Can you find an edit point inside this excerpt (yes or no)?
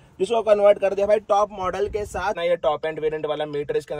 yes